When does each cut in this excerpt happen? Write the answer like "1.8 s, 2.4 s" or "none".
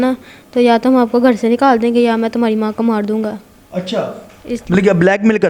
none